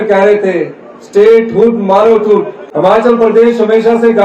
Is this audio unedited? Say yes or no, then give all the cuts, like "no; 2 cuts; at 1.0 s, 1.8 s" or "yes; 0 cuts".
no; 1 cut; at 2.6 s